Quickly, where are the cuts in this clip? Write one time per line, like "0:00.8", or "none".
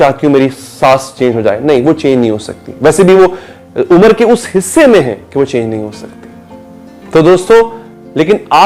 none